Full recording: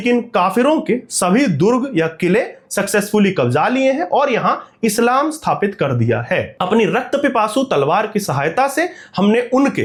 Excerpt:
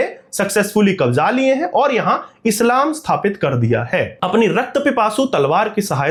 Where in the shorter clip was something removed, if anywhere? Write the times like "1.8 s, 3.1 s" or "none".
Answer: none